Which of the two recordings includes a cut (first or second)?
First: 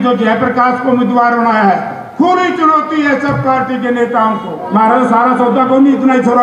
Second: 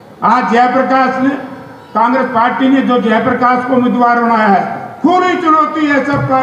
first